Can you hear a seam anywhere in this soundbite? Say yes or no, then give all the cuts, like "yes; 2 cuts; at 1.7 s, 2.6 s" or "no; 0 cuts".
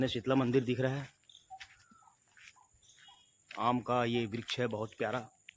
no; 0 cuts